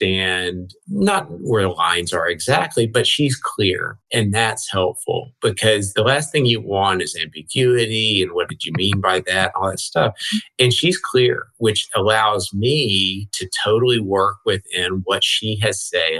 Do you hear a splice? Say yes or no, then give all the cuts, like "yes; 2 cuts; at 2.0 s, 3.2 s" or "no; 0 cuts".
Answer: yes; 1 cut; at 3.9 s